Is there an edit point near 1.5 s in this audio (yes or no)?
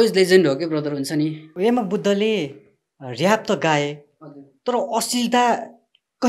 yes